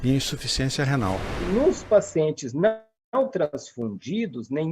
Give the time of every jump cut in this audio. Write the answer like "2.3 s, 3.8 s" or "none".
1.4 s

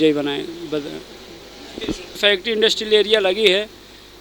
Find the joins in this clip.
2.2 s

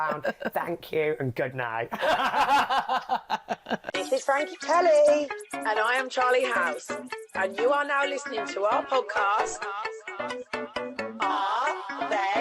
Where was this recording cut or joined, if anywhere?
3.8 s

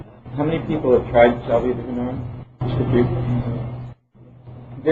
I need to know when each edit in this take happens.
none

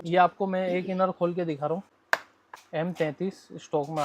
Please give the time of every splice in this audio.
2.0 s

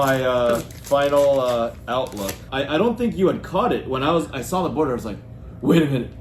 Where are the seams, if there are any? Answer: 2.5 s

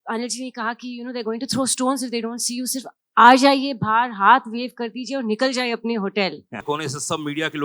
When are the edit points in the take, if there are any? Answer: 6.6 s

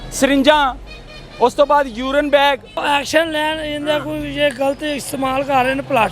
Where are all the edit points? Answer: 2.8 s

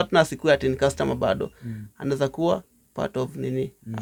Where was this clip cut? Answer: none

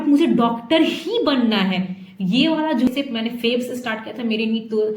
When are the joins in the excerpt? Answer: 2.9 s

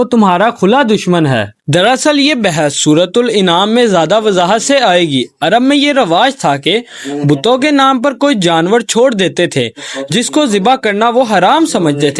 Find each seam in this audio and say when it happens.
none

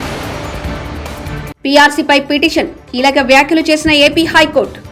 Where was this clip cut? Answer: 1.5 s

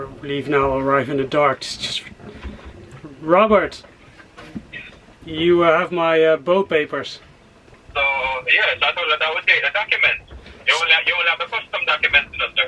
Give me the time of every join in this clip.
none

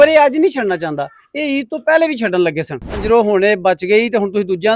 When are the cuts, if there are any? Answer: 2.9 s

